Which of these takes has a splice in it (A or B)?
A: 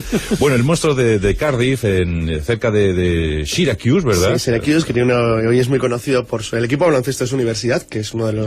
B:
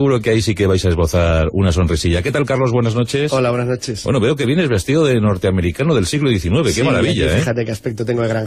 B